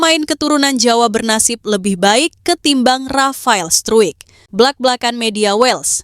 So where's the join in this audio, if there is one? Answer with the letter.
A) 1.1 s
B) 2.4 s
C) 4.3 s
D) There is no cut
C